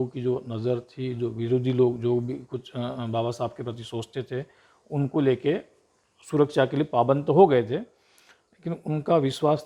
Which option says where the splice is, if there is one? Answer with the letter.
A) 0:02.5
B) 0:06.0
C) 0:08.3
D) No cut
D